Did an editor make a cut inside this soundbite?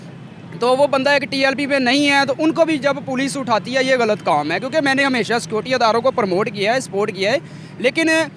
no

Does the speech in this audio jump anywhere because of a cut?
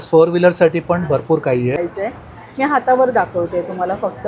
yes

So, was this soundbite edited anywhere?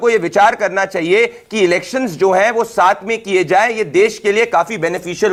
no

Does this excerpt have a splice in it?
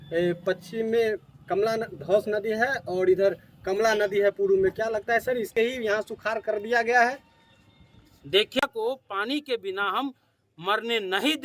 yes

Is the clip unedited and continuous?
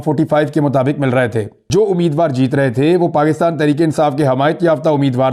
no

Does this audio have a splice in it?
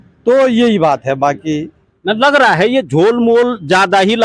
no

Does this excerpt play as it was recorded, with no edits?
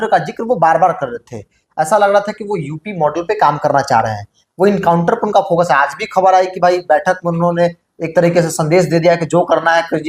yes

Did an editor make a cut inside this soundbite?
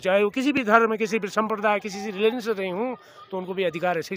no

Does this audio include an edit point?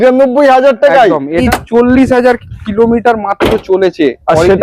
yes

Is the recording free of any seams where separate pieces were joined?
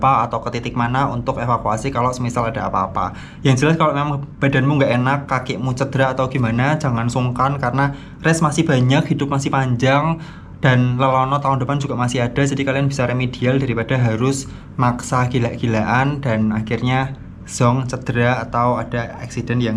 yes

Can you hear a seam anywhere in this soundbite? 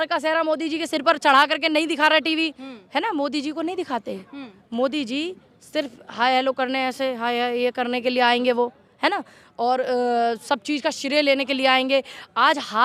no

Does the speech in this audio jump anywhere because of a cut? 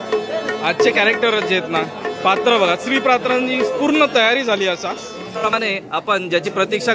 yes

